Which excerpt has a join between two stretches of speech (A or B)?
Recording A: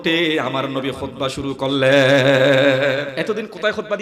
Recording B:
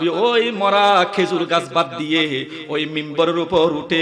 A